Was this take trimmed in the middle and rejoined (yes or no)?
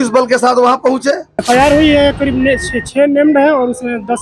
yes